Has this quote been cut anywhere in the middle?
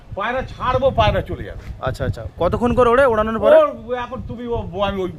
no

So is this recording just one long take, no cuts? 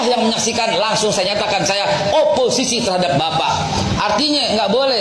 yes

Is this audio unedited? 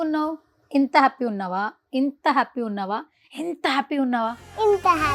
yes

